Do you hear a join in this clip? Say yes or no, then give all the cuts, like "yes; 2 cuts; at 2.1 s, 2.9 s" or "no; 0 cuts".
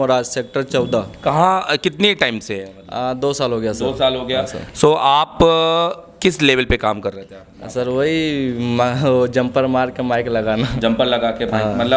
no; 0 cuts